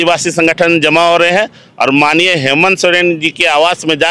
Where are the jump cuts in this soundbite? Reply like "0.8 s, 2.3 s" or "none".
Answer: none